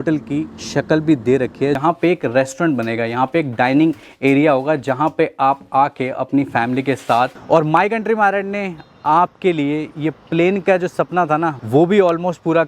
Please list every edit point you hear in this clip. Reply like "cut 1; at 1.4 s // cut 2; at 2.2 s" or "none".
cut 1; at 1.8 s // cut 2; at 7.3 s // cut 3; at 11.6 s